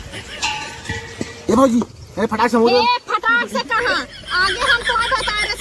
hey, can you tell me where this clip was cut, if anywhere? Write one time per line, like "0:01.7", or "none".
0:01.5

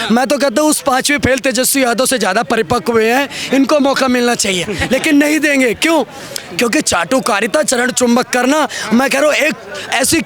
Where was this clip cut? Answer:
none

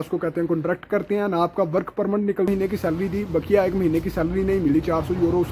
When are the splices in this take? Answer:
0:02.5

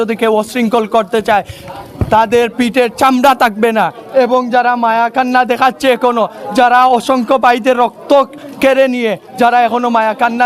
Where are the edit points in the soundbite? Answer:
none

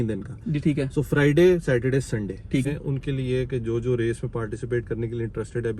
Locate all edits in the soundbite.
0:02.7

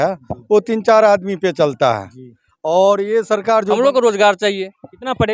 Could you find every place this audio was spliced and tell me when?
0:03.8

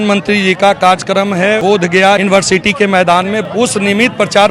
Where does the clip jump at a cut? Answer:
0:01.8
0:03.4

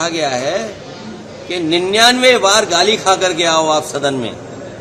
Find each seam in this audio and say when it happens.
none

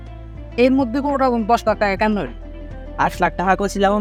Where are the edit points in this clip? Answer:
none

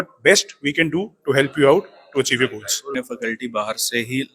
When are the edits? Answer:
0:03.0

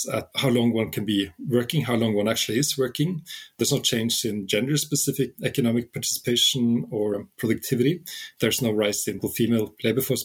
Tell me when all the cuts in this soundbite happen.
0:07.1
0:09.2

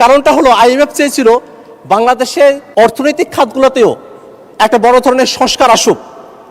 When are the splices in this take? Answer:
0:02.6

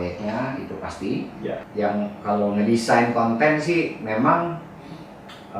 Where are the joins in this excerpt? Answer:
0:01.7

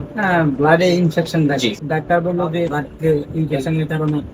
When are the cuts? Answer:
0:01.8
0:02.8

